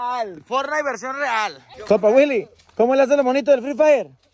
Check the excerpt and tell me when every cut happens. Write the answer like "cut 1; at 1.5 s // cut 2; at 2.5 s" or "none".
cut 1; at 1.7 s